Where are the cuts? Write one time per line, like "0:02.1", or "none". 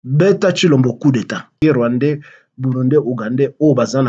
0:01.5